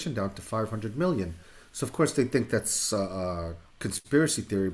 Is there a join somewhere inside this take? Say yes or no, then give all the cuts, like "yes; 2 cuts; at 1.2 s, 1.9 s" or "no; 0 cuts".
yes; 1 cut; at 3.6 s